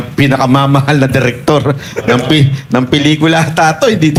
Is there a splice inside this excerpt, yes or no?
no